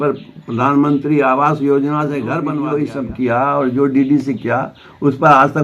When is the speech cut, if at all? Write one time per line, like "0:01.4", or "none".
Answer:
0:02.4